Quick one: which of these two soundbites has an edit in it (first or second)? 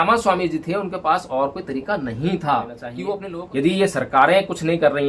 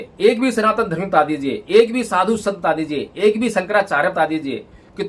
first